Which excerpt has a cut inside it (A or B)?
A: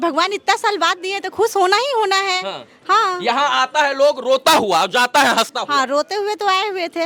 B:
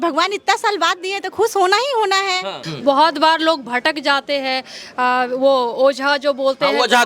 B